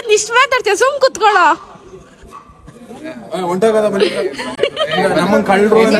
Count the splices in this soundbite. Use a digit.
0